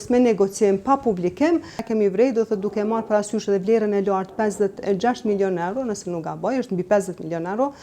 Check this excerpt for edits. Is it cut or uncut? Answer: cut